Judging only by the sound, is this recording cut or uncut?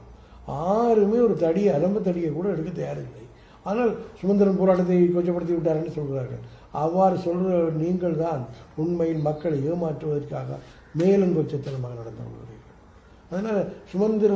uncut